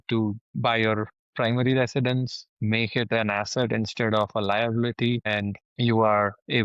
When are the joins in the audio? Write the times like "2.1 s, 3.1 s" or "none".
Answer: none